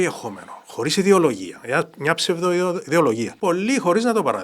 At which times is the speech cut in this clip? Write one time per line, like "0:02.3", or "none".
0:03.3

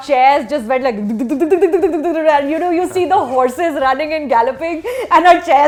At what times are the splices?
none

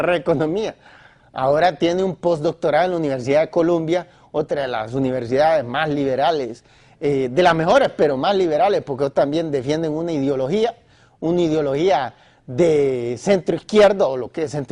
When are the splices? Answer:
0:10.1

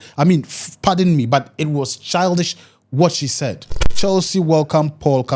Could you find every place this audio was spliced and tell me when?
0:03.9

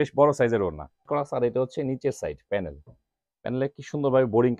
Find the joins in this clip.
0:01.0

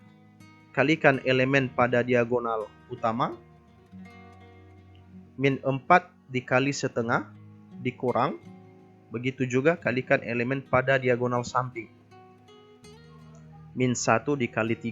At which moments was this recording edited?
0:11.9
0:13.7

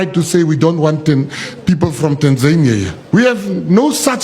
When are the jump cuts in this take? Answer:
0:03.0

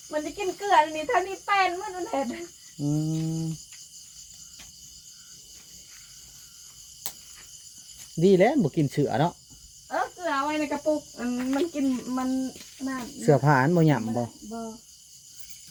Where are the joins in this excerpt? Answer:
none

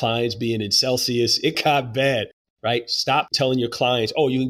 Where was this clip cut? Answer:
0:01.5
0:02.7

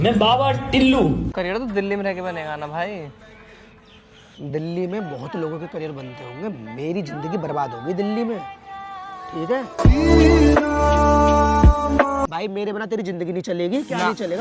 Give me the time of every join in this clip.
0:01.3
0:12.2

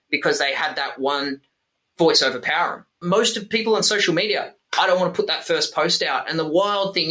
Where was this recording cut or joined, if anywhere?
0:03.0

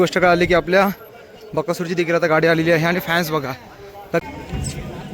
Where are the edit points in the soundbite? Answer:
0:04.2

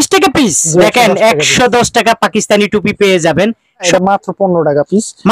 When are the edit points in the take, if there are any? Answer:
0:00.8
0:03.9

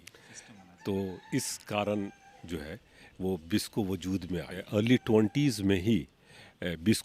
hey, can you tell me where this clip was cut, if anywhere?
0:04.6

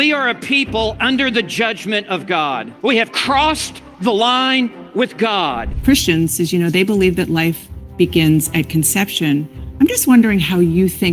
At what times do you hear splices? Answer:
0:02.7
0:05.7

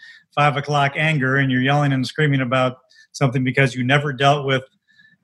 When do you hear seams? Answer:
none

